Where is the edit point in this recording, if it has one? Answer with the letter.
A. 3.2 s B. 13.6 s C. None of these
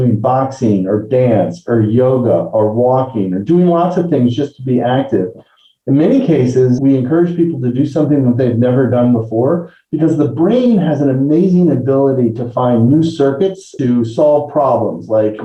C